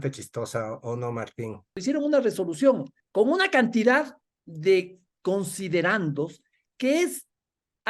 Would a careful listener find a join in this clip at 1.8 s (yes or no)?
yes